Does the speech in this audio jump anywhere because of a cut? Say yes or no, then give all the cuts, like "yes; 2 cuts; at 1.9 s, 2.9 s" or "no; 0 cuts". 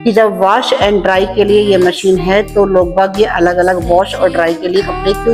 no; 0 cuts